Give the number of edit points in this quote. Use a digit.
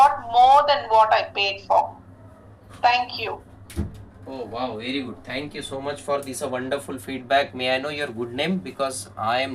0